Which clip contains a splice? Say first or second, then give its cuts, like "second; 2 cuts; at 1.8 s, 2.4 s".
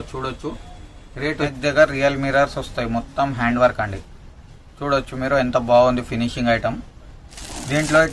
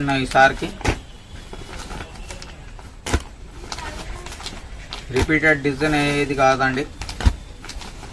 first; 1 cut; at 1.5 s